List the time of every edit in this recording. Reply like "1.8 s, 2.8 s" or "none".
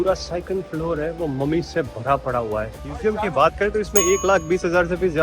2.9 s